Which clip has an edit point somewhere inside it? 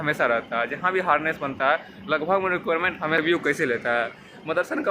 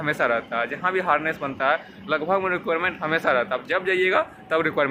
first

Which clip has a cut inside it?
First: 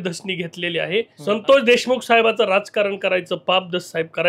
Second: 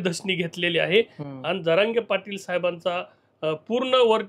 first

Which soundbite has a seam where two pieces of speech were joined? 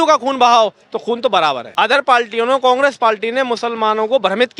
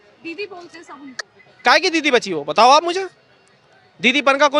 first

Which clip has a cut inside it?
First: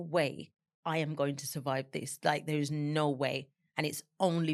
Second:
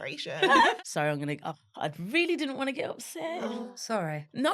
second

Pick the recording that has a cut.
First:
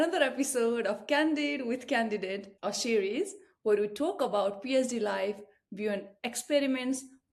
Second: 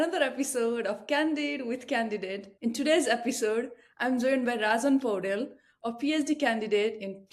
second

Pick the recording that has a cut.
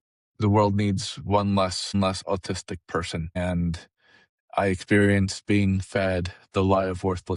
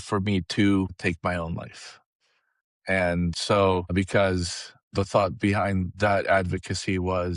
second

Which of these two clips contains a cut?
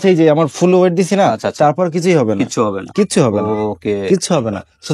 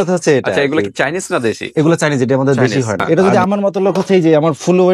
second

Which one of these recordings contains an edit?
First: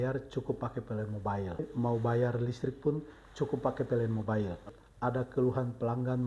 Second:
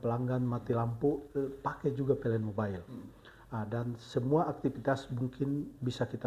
first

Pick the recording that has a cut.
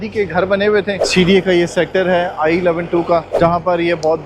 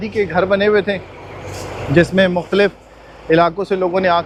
first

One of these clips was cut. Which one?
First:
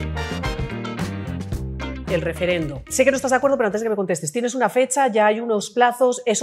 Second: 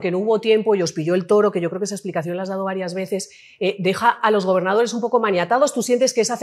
first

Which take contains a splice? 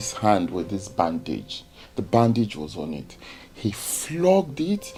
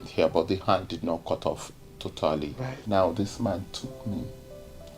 second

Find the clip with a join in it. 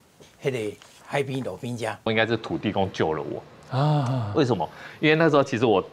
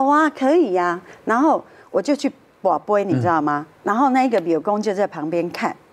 first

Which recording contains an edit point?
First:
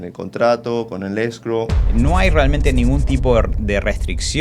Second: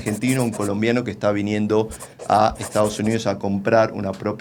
first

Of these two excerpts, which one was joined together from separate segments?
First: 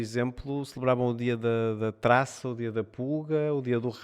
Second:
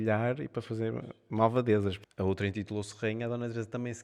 second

